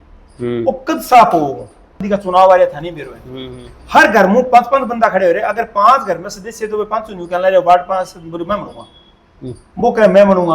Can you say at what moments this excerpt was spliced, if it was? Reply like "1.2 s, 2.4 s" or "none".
2.0 s